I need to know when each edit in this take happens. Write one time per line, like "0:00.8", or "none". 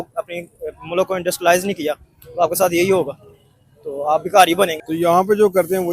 0:04.9